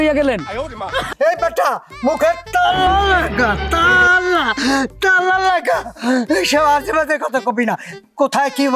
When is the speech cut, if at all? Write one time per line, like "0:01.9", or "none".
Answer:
0:01.1